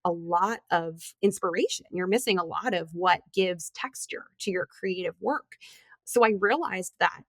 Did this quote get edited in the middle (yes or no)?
yes